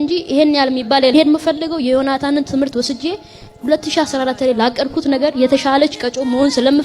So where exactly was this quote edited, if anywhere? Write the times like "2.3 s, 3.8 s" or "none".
1.1 s